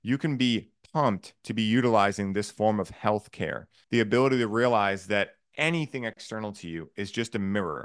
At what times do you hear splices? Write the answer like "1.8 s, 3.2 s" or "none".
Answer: 3.8 s